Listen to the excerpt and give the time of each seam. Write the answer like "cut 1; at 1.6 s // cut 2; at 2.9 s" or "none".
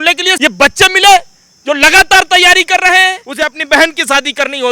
cut 1; at 3.2 s